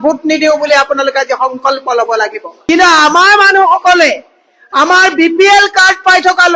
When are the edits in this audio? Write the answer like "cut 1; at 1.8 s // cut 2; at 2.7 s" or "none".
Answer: cut 1; at 2.5 s